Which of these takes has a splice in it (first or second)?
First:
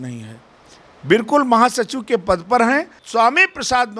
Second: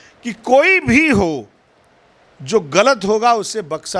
first